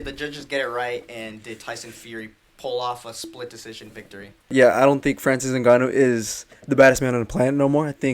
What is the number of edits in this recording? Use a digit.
1